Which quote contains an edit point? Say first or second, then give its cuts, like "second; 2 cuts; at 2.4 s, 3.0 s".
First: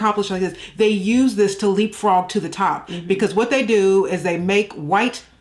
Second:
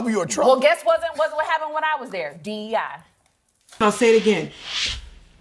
second; 1 cut; at 3.8 s